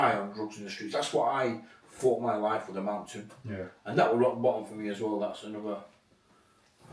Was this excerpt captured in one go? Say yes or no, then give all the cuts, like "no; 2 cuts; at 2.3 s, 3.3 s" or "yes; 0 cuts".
yes; 0 cuts